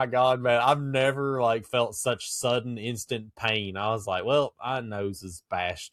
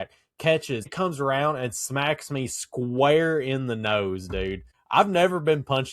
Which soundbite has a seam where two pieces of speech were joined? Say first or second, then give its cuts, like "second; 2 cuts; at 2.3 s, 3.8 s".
second; 2 cuts; at 0.9 s, 4.7 s